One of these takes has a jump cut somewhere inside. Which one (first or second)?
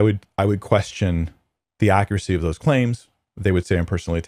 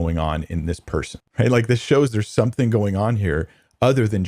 second